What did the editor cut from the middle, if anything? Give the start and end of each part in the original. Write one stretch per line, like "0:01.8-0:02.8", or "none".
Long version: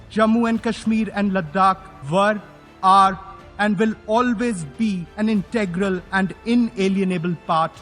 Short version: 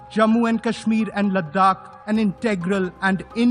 0:02.0-0:05.1